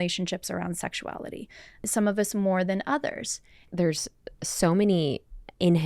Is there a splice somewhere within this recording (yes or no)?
yes